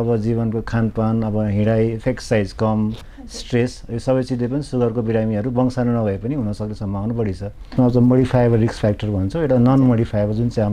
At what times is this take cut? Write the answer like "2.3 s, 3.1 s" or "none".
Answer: 7.7 s